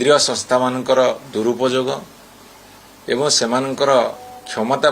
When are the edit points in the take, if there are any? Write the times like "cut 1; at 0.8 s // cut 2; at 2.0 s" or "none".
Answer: none